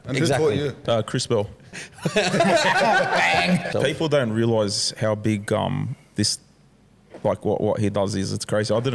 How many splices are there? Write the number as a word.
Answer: two